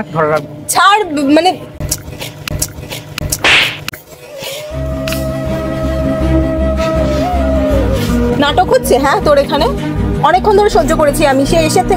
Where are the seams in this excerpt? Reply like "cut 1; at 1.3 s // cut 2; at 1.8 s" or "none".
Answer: none